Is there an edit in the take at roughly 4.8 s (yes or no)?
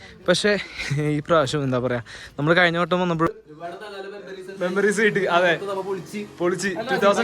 no